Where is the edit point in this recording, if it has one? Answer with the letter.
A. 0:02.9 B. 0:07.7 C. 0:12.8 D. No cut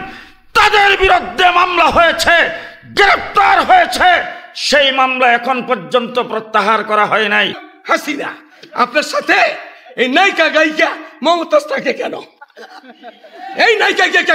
B